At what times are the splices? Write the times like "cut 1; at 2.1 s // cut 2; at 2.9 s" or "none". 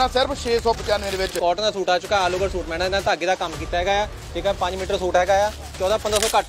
cut 1; at 1.3 s